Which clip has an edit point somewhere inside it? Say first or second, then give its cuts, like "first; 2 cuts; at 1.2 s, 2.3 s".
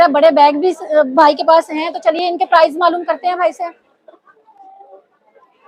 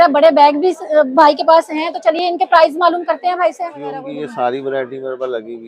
second; 1 cut; at 4.0 s